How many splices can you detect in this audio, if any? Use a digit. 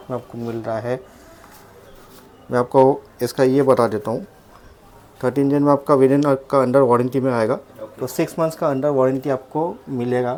0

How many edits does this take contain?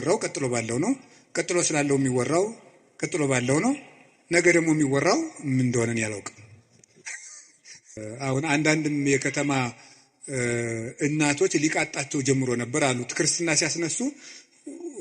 1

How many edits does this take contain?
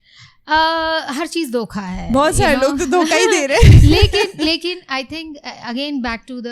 0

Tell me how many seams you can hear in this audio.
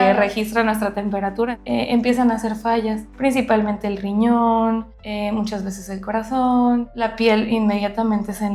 4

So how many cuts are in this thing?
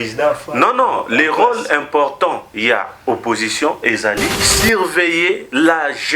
1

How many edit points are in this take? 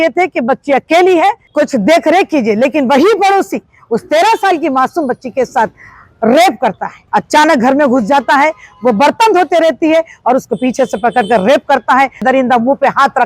3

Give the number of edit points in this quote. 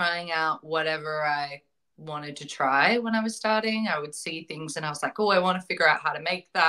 0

